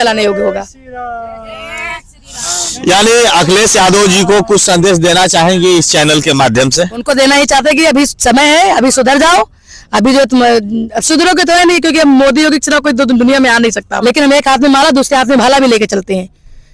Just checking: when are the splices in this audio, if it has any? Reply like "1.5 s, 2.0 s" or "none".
13.9 s